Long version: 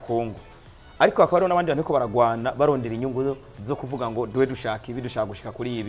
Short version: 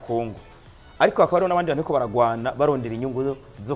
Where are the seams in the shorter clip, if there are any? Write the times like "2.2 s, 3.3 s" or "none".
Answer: none